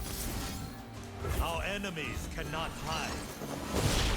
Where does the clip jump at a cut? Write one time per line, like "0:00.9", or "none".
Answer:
0:01.0